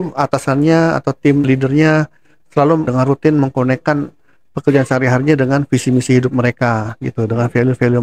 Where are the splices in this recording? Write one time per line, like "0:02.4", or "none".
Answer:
0:01.4
0:02.9